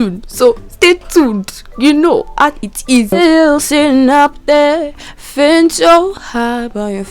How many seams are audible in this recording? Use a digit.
1